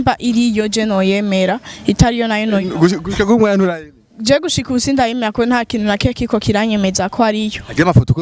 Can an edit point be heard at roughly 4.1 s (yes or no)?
no